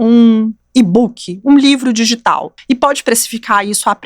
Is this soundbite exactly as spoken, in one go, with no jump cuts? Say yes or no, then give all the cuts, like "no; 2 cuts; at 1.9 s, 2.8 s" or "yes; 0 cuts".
no; 1 cut; at 2.5 s